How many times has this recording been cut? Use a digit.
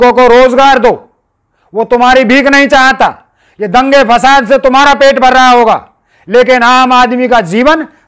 0